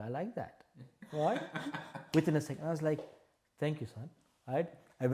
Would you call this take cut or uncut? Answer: uncut